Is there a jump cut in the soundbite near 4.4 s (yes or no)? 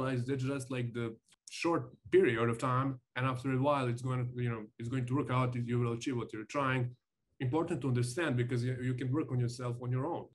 no